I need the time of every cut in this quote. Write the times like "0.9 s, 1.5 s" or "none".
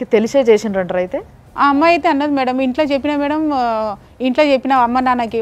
none